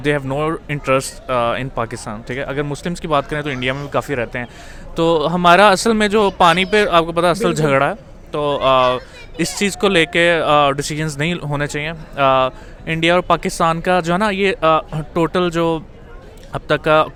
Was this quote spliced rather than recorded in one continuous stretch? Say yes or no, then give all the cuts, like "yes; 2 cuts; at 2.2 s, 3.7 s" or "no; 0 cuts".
no; 0 cuts